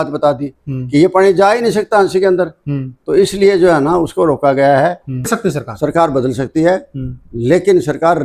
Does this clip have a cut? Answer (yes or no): yes